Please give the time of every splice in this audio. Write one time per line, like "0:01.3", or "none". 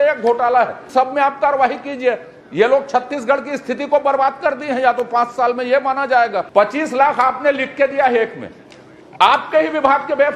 0:00.8
0:06.4